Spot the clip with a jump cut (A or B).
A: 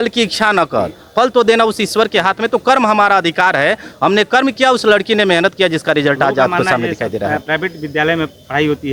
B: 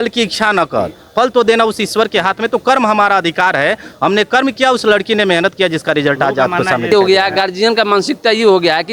B